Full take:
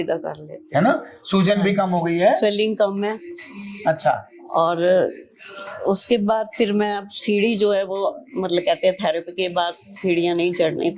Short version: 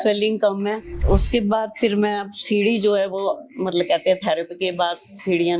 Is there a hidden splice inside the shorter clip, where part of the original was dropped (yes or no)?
yes